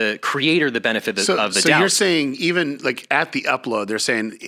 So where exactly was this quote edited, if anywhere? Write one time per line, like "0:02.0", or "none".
0:01.7

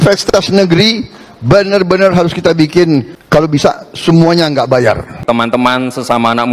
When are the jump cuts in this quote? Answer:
0:03.2
0:05.1

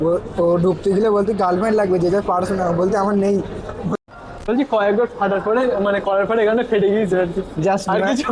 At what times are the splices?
0:03.9

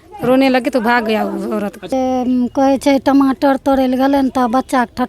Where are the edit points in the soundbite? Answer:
0:01.9

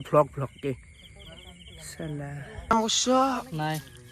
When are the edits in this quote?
0:02.4

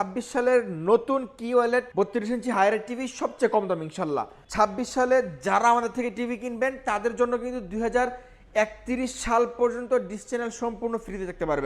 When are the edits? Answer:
0:01.9
0:04.4

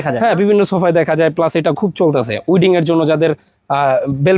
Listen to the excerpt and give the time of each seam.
none

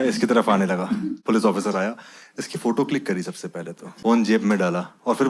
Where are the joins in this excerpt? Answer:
0:01.2
0:03.8

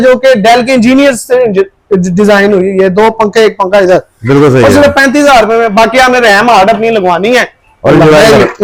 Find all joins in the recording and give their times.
none

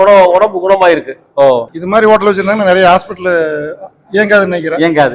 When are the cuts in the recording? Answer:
0:01.2

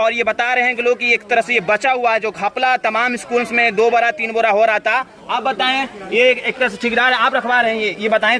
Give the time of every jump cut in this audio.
none

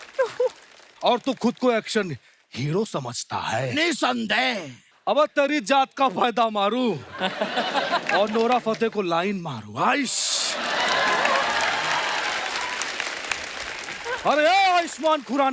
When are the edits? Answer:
none

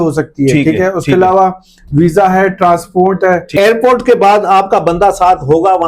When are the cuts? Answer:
0:03.5

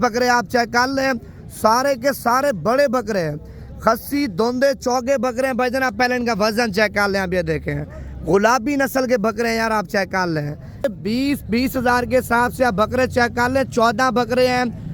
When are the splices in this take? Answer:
0:10.9

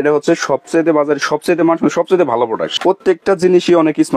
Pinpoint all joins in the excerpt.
0:02.7

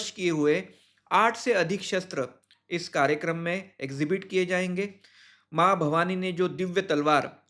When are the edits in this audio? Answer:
none

